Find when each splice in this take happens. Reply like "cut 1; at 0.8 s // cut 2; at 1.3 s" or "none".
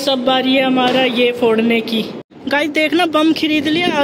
cut 1; at 2.3 s